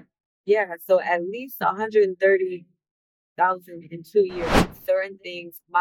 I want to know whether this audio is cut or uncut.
cut